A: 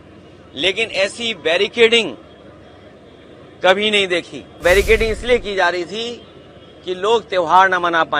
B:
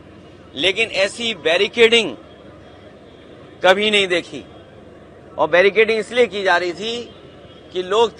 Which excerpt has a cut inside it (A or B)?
A